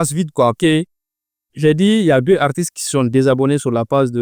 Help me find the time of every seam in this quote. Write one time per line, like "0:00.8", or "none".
none